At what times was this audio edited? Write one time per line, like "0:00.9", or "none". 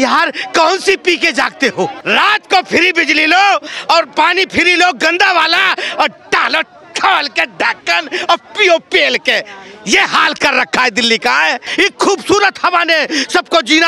0:02.0
0:11.6